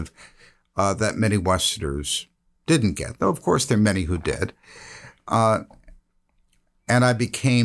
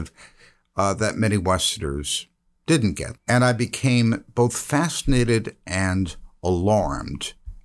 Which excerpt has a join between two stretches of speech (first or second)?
second